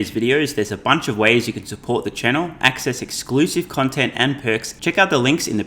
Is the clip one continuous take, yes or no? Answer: no